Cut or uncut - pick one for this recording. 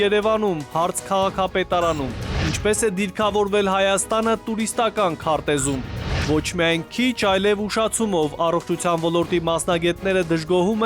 cut